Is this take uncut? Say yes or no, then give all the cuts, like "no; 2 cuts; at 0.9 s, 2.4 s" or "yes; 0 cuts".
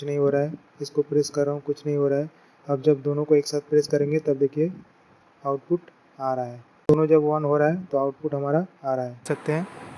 no; 2 cuts; at 7.0 s, 9.2 s